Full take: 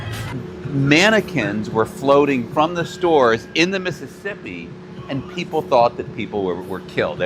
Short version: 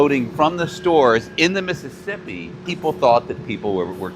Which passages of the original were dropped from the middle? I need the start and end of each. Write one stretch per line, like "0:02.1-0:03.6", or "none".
0:04.8-0:05.3